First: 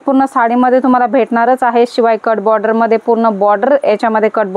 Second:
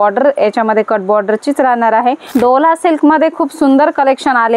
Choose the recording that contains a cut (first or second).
second